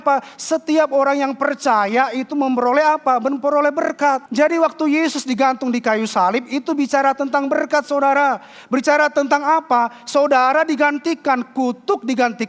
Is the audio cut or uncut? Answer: cut